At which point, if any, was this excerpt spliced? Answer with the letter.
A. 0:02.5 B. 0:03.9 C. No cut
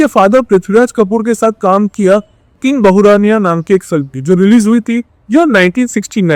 C